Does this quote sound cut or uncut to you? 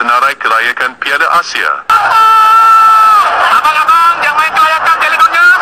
cut